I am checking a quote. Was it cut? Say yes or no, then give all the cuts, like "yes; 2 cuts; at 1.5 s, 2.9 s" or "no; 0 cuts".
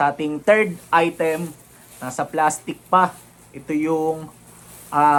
no; 0 cuts